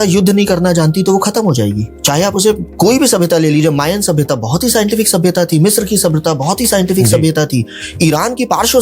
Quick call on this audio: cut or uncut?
uncut